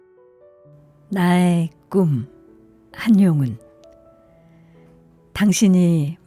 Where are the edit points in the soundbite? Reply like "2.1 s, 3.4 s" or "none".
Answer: 1.1 s